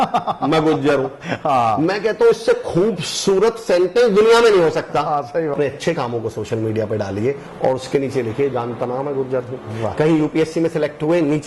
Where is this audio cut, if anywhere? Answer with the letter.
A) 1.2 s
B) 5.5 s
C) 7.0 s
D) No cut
B